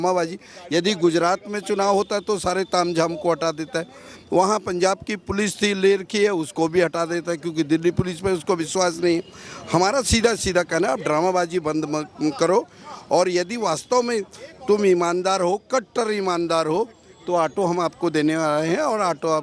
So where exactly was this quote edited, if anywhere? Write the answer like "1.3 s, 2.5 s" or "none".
none